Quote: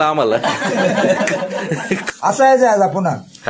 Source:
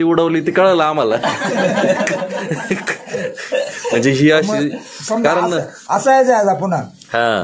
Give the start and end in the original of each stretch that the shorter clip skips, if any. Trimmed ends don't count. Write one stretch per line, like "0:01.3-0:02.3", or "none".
0:02.9-0:05.8